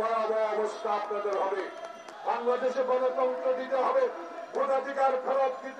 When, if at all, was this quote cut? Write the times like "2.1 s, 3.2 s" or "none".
2.1 s